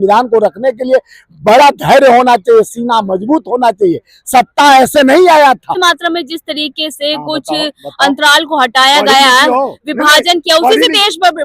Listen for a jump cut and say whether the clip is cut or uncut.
cut